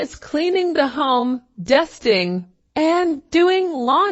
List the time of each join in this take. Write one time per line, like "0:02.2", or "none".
0:02.6

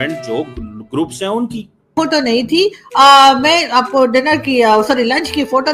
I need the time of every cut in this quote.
0:01.9

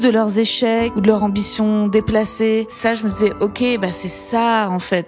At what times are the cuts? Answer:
0:00.9
0:02.7

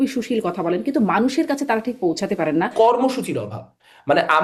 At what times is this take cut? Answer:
0:02.7

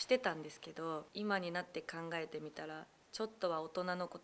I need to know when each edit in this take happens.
0:01.1

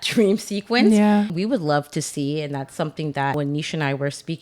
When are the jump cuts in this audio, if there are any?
0:01.3
0:03.3

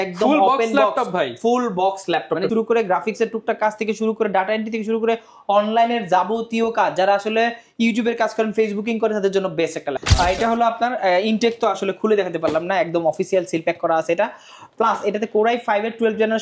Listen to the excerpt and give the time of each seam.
0:02.5
0:10.0

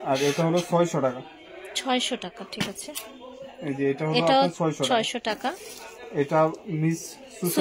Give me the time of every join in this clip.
none

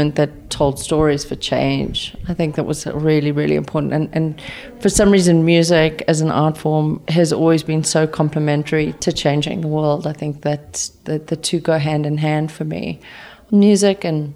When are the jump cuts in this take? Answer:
0:13.3

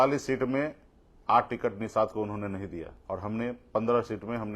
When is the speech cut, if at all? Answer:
0:02.9

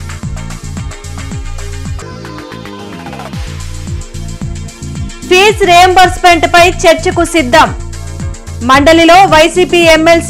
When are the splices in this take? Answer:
0:01.9
0:04.7

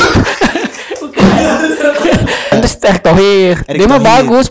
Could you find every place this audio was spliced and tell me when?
0:02.6

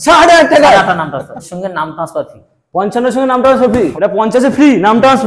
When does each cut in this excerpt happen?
0:01.5
0:03.9

